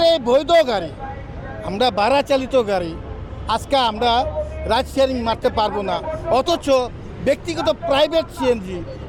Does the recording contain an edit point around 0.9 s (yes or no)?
no